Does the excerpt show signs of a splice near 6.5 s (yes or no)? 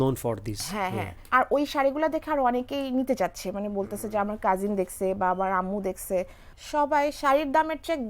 yes